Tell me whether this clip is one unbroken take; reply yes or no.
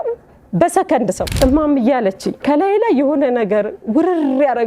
no